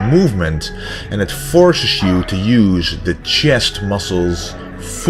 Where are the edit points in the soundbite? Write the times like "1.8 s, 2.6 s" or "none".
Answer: none